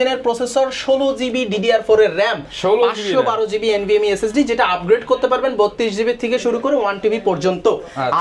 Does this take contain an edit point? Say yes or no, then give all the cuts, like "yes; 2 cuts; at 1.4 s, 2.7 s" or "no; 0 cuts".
no; 0 cuts